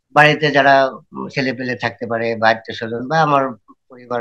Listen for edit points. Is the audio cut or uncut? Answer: uncut